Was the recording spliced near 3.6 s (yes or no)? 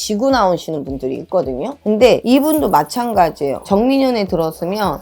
yes